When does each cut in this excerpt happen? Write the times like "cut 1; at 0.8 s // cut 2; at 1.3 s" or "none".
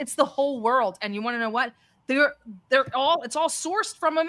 none